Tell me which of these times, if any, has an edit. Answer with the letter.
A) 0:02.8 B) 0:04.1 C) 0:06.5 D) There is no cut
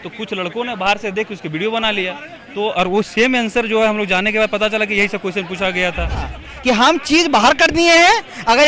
C